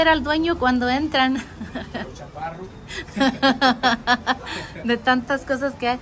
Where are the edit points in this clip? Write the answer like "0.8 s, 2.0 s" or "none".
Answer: none